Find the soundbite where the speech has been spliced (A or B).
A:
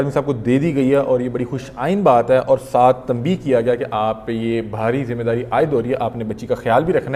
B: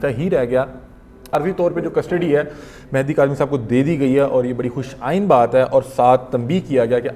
B